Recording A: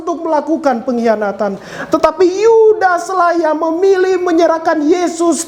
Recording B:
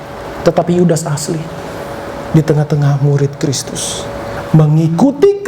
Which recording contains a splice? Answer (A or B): B